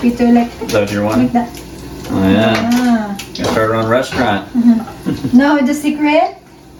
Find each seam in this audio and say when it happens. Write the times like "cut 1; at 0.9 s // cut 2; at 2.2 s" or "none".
none